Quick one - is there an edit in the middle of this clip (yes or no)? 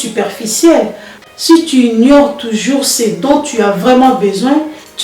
yes